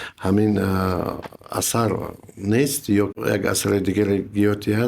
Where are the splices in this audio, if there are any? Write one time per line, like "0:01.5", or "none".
0:03.1